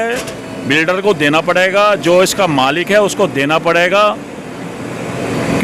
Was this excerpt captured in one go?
yes; 0 cuts

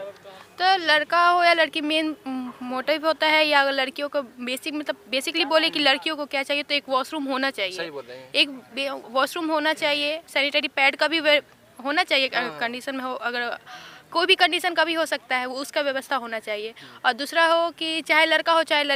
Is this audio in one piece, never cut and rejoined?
yes; 0 cuts

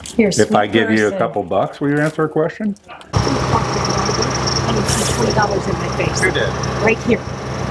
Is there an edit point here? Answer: yes; 1 cut; at 3.1 s

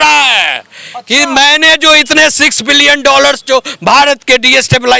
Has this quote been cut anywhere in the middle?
no; 0 cuts

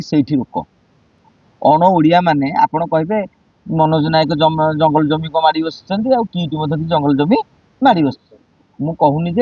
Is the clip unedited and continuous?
yes; 0 cuts

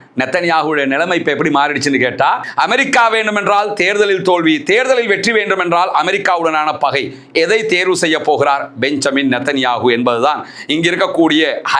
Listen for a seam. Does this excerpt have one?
yes; 1 cut; at 2.4 s

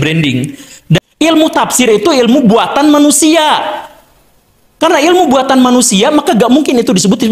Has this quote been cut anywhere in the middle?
yes; 1 cut; at 1.0 s

